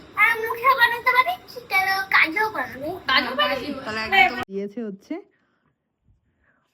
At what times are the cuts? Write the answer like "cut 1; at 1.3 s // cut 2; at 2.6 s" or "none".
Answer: cut 1; at 4.5 s

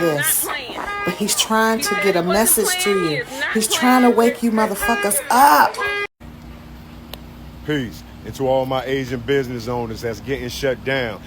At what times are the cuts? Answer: cut 1; at 6.1 s

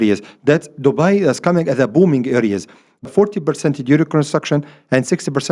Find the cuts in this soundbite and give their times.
cut 1; at 3.1 s

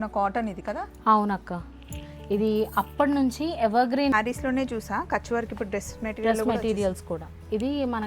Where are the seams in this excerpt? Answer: cut 1; at 4.1 s

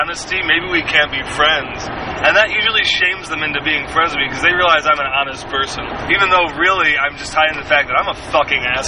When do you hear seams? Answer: cut 1; at 6.0 s

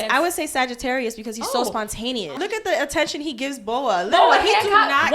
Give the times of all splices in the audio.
cut 1; at 2.3 s

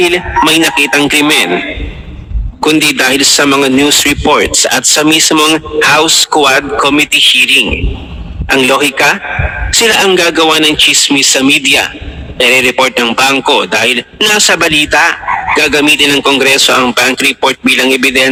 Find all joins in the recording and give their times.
none

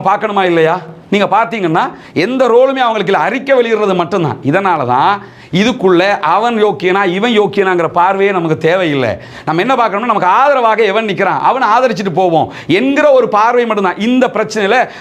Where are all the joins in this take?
none

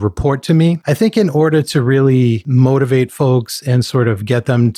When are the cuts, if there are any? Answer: cut 1; at 0.8 s // cut 2; at 2.4 s

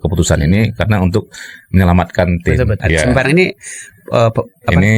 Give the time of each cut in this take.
cut 1; at 2.8 s

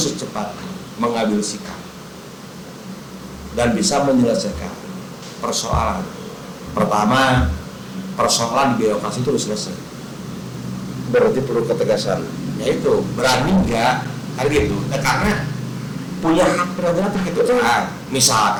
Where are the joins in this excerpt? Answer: none

